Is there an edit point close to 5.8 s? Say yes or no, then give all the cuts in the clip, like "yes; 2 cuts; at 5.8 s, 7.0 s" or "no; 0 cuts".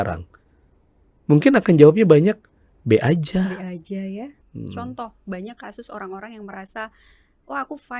no; 1 cut; at 4.3 s